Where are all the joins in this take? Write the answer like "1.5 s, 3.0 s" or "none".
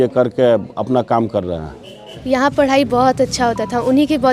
2.2 s